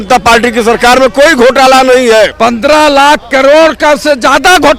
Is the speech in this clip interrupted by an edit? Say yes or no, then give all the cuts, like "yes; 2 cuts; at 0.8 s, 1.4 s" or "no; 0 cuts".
yes; 1 cut; at 2.3 s